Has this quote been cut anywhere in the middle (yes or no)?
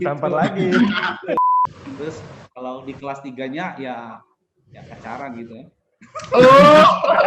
yes